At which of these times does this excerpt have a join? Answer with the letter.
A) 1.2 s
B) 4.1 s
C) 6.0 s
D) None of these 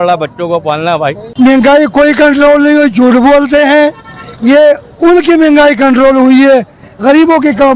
A